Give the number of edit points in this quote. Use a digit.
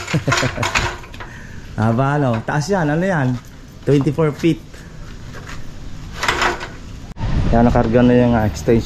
1